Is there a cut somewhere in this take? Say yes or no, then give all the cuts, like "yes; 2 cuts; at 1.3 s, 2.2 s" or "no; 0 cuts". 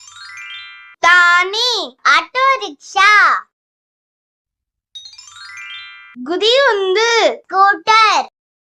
no; 0 cuts